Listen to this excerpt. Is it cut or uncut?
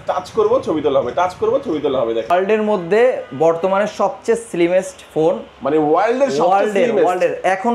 cut